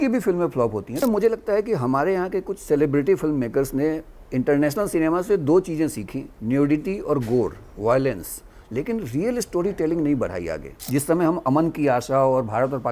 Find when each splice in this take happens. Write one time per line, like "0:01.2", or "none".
0:01.0
0:10.9